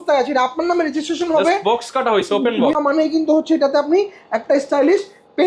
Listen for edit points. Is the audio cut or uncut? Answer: cut